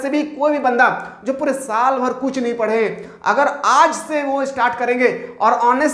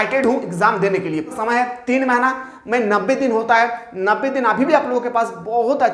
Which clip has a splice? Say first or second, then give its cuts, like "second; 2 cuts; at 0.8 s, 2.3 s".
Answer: second; 1 cut; at 1.3 s